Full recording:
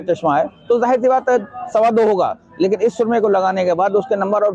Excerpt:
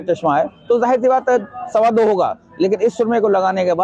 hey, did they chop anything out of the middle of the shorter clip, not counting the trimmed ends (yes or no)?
no